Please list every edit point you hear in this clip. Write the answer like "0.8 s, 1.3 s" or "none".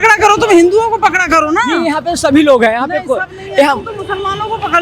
none